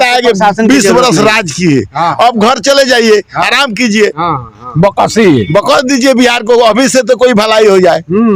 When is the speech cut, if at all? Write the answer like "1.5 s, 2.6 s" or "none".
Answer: none

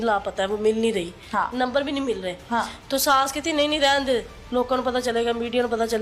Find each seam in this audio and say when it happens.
none

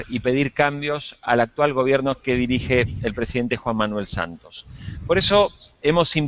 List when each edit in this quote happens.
3.5 s

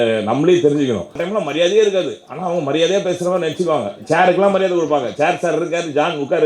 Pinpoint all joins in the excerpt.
1.2 s

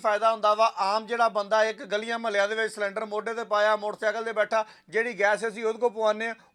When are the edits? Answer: none

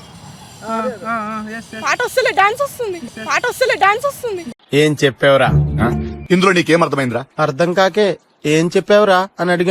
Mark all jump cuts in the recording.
none

